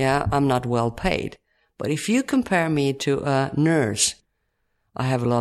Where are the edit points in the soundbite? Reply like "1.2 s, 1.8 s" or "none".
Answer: 4.1 s

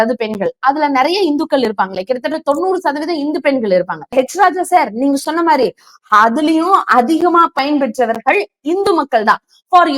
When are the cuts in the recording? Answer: 4.1 s

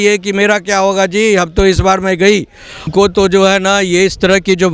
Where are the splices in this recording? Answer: 2.9 s

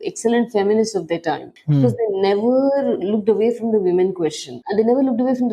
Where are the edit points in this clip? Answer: 4.6 s

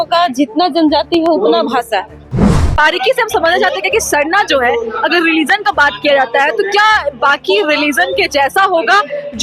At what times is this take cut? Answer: 2.5 s

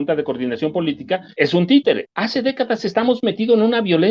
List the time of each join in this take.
1.3 s, 2.1 s

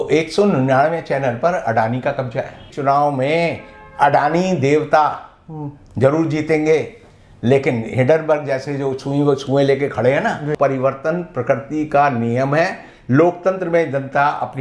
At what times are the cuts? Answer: 2.6 s, 10.5 s

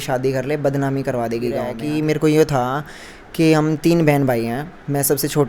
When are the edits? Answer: 1.8 s

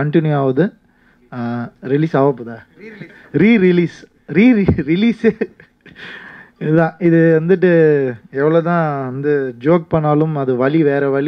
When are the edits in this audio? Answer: none

